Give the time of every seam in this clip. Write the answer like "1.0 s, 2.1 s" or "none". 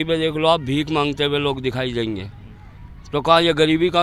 none